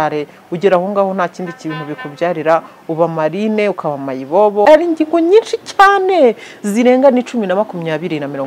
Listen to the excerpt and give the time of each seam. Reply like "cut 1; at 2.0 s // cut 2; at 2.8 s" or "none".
cut 1; at 4.6 s